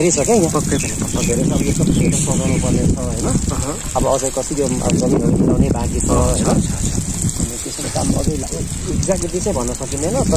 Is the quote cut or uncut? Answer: uncut